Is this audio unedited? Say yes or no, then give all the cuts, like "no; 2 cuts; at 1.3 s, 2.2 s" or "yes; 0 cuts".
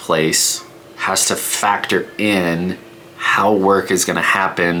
yes; 0 cuts